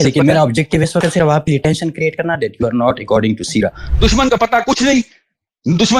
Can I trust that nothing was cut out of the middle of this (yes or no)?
no